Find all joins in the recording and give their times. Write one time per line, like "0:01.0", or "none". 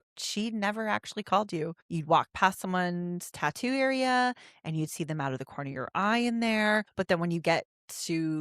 0:01.9
0:06.9